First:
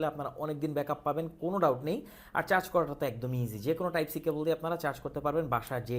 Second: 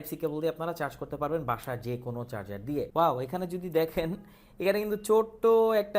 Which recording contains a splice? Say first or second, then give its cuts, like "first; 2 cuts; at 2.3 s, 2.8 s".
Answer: second; 1 cut; at 2.9 s